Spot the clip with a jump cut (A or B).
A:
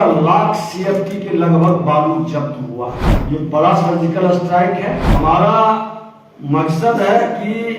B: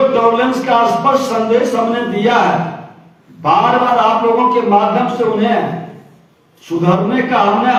A